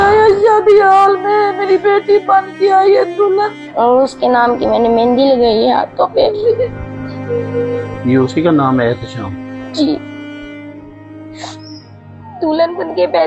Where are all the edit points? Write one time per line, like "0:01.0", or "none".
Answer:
0:03.6